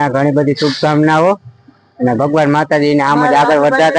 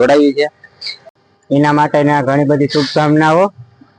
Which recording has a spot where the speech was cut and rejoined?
second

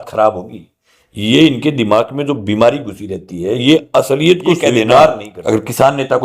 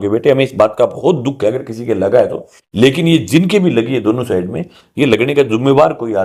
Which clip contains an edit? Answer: first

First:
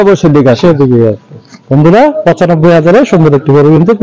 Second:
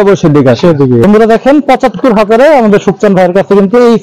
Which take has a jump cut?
second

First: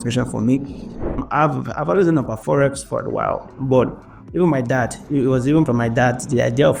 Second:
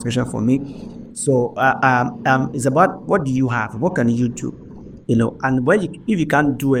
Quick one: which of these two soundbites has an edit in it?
first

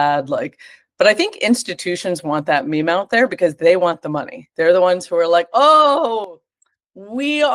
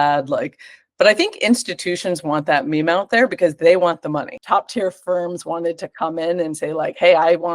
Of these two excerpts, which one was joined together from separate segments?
second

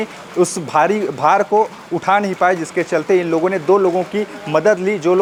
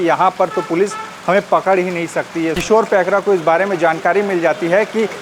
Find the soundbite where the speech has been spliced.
second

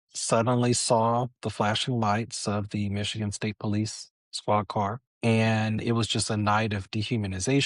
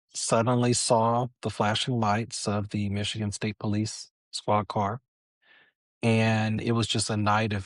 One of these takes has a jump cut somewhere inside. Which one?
first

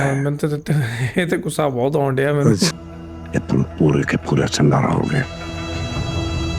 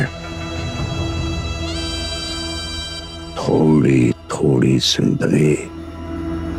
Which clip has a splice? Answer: first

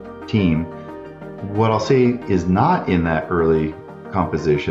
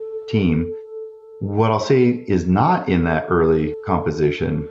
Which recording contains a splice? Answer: second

